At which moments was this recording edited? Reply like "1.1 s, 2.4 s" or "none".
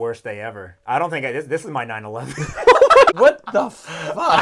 3.1 s